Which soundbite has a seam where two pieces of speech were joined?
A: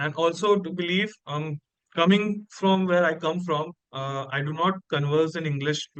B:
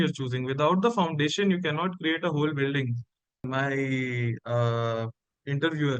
B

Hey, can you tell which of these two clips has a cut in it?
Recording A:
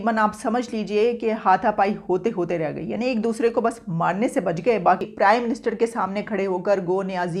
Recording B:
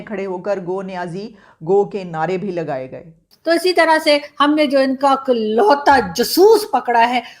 B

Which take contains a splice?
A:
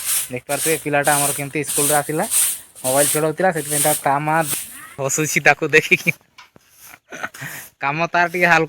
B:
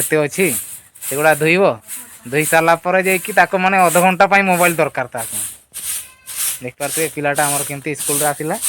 A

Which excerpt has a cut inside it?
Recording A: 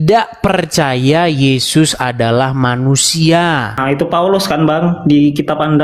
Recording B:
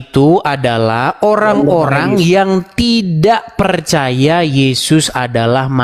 A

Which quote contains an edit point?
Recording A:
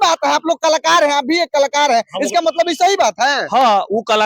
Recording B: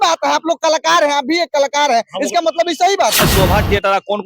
B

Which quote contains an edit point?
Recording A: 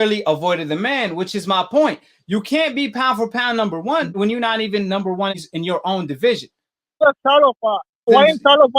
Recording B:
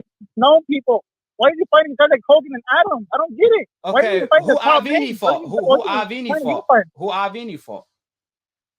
A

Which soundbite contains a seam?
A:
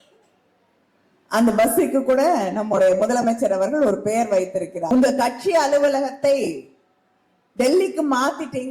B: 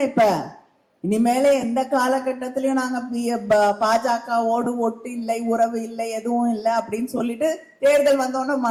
A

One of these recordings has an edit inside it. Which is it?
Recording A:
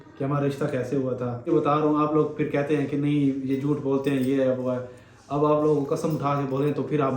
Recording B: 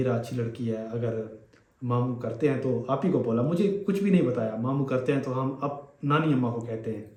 A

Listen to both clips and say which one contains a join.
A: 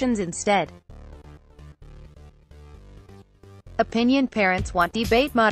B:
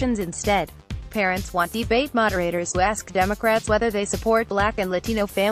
B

